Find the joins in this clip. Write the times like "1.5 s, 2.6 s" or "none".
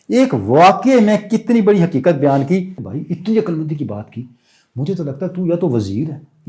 2.9 s